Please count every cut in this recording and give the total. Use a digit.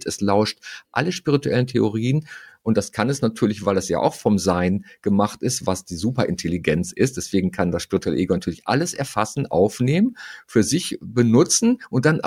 0